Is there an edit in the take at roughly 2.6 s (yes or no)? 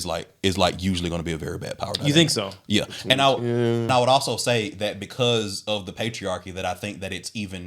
no